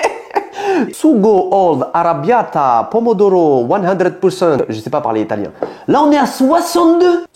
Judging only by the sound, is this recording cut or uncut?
cut